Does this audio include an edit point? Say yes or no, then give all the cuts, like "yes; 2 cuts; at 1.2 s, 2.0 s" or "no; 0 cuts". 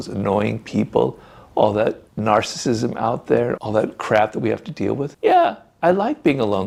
no; 0 cuts